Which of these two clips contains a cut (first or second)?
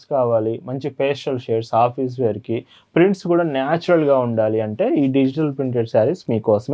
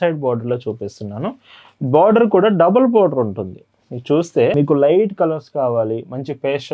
second